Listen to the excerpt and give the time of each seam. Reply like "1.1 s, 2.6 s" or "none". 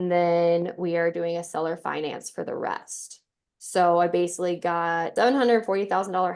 5.1 s